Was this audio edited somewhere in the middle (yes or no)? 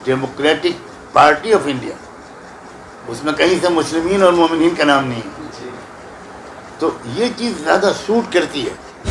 no